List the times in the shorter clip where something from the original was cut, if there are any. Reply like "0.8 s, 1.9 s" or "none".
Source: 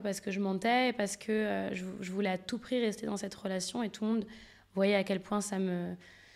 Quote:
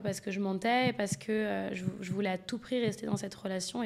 none